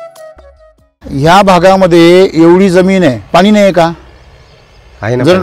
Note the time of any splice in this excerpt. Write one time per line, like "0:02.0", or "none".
0:01.0